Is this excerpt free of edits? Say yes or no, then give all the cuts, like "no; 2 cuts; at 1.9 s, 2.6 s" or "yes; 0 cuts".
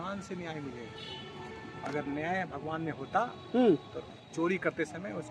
yes; 0 cuts